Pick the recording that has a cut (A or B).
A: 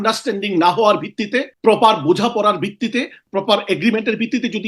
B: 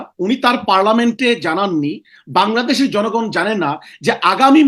A